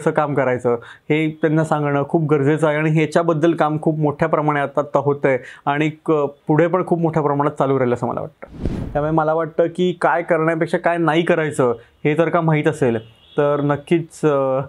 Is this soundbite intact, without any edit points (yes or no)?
no